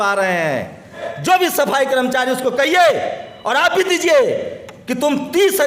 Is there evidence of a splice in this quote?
yes; 1 cut; at 1.1 s

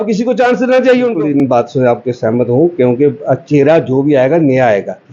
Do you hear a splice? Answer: yes; 1 cut; at 1.2 s

